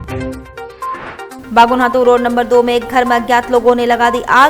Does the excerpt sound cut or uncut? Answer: cut